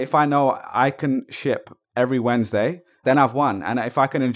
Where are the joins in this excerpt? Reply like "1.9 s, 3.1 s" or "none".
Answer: 3.0 s